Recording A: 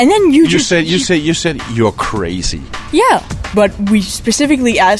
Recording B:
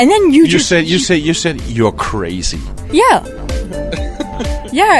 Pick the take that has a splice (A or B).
A